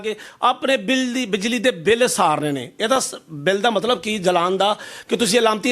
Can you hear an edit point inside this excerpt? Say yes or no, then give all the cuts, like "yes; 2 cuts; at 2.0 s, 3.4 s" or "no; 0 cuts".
no; 0 cuts